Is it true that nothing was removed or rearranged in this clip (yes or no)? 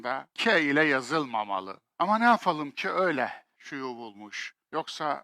no